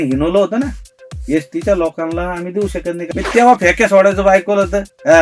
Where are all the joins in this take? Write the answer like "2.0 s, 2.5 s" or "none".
3.0 s